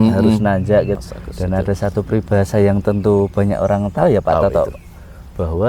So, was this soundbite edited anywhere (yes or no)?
yes